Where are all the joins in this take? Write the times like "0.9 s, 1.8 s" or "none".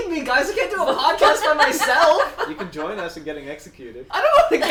none